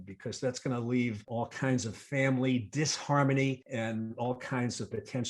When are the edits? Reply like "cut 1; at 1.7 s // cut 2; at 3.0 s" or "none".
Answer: cut 1; at 1.3 s // cut 2; at 3.6 s